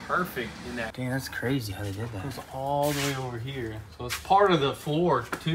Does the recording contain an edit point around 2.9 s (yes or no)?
no